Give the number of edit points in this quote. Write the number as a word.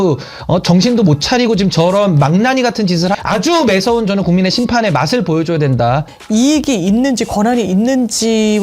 two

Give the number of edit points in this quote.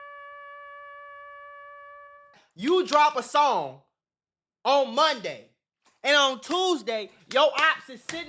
one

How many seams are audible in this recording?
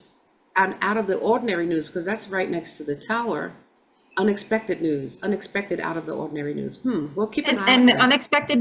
one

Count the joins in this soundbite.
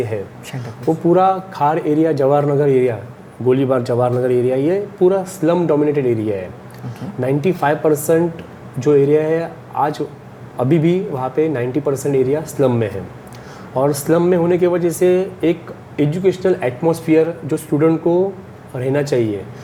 zero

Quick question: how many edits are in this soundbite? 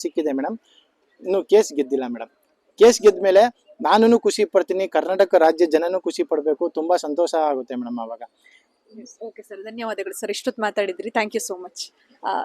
zero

